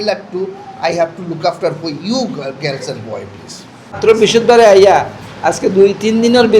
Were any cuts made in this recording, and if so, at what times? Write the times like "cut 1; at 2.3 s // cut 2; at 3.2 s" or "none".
cut 1; at 4.0 s